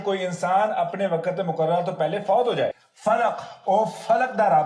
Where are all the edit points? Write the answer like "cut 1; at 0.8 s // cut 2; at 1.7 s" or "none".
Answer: cut 1; at 2.9 s